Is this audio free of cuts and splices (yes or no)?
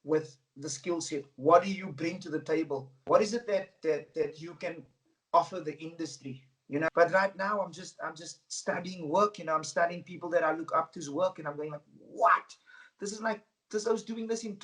no